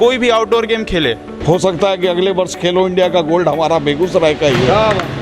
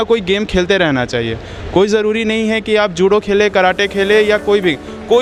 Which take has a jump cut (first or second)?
first